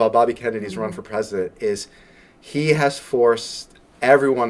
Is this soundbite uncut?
yes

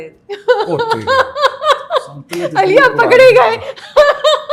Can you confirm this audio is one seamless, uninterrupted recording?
yes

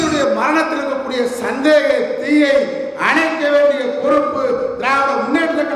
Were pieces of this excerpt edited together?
no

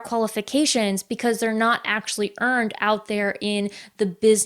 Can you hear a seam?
no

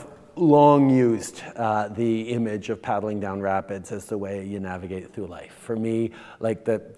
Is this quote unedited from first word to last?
yes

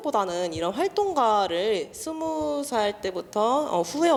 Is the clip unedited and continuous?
yes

